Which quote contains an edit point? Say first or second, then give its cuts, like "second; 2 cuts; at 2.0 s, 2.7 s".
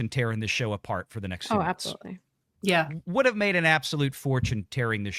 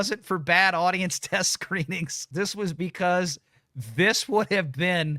second; 1 cut; at 2.2 s